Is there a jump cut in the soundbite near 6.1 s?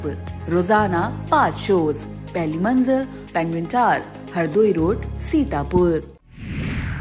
yes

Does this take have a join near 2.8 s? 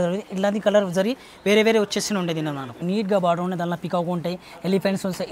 yes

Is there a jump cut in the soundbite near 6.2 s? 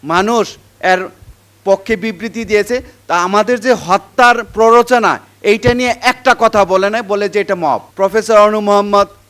no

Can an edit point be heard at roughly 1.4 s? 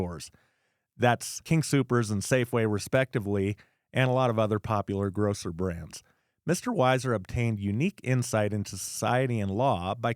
yes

